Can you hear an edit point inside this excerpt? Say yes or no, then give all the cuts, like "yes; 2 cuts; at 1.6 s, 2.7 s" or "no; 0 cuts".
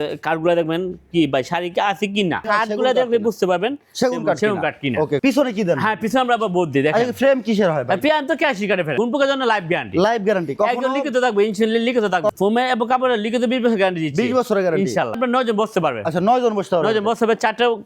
yes; 5 cuts; at 2.4 s, 5.2 s, 8.9 s, 12.3 s, 15.2 s